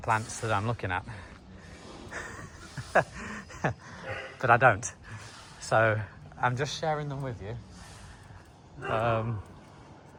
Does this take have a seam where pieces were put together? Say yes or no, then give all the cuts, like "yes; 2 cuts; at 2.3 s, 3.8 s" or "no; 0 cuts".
no; 0 cuts